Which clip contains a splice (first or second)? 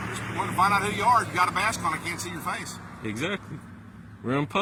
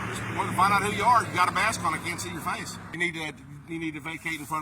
second